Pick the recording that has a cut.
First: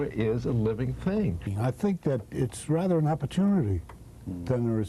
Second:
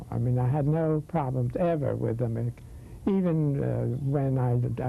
first; 1 cut; at 1.5 s

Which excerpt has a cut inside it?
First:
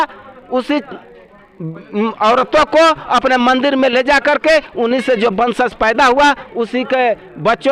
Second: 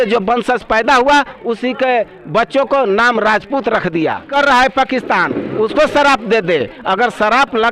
second; 1 cut; at 4.3 s

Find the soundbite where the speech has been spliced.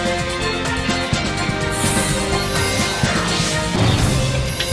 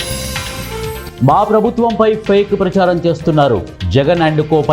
second; 1 cut; at 1.1 s

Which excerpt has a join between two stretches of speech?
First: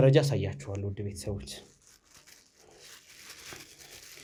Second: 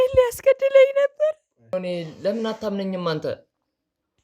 second; 1 cut; at 1.7 s

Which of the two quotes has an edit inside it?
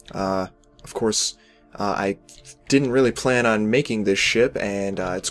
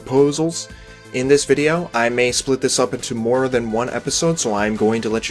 second; 1 cut; at 4.2 s

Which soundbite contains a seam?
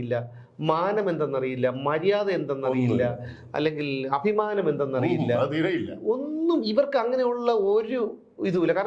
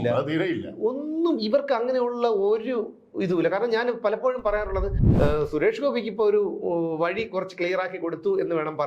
second; 1 cut; at 5.0 s

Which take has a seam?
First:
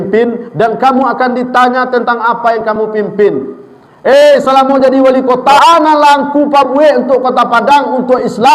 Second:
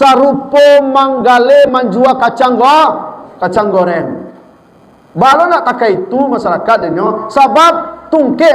first; 1 cut; at 5.6 s

